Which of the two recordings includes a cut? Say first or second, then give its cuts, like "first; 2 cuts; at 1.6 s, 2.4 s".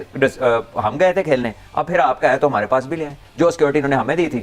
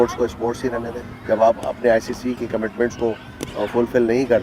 second; 1 cut; at 1.0 s